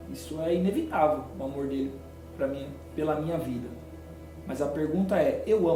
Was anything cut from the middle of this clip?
no; 0 cuts

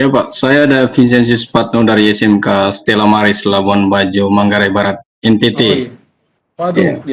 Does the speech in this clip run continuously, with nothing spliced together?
yes; 0 cuts

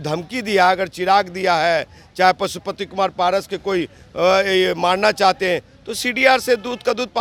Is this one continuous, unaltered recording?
yes; 0 cuts

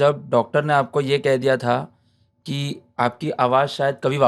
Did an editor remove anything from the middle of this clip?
no; 0 cuts

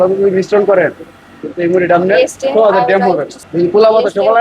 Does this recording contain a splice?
yes; 1 cut; at 3.4 s

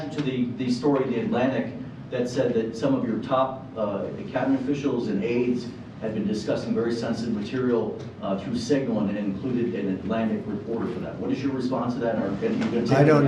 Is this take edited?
no; 0 cuts

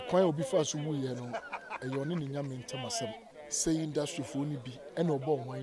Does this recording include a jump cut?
yes; 1 cut; at 3.3 s

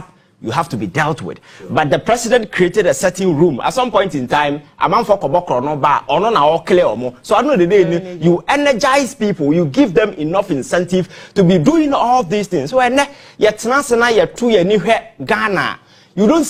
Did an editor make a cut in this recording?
no; 0 cuts

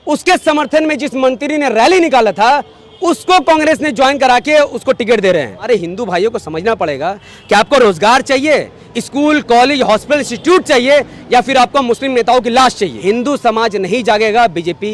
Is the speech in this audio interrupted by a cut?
yes; 2 cuts; at 5.6 s, 12.9 s

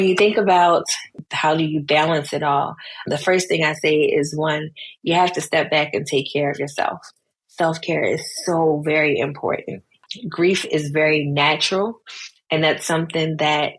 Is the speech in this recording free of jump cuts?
no; 2 cuts; at 1.1 s, 10.2 s

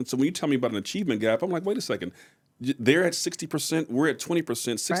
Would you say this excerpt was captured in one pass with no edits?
yes; 0 cuts

